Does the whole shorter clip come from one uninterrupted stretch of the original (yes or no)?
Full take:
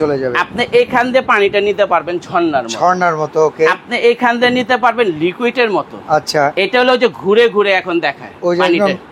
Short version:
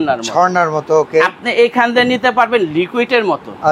yes